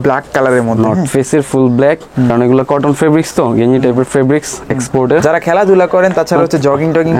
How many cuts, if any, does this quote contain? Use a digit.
2